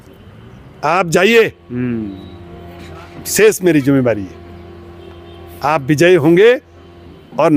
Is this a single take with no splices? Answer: yes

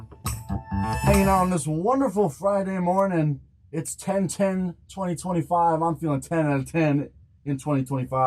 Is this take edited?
yes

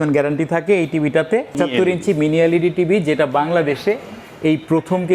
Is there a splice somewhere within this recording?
yes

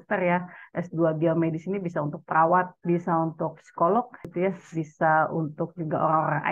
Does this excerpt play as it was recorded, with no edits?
no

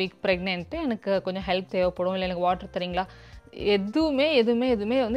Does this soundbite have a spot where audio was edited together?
no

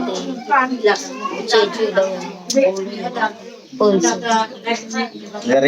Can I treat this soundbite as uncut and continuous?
yes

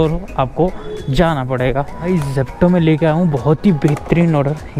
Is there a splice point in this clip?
yes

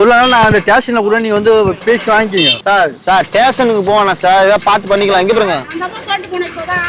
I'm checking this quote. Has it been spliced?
yes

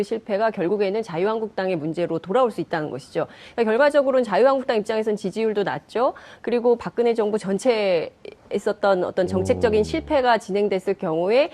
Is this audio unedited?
no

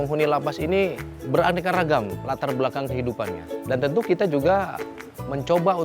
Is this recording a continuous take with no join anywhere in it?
no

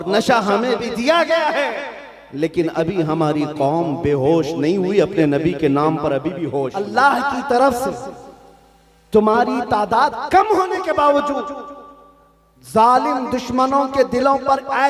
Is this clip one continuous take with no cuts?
no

